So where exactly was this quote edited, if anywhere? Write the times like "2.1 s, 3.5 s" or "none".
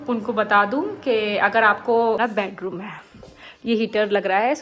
2.2 s